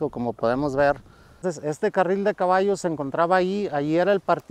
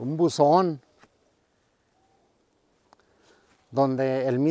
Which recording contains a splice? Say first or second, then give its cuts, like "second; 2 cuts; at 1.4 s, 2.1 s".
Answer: first; 1 cut; at 1.4 s